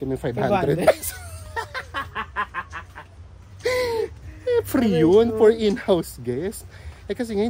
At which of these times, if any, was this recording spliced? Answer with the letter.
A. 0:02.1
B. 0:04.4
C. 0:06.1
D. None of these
D